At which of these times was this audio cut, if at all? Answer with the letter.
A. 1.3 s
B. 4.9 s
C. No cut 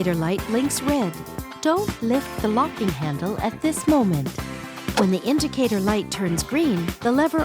B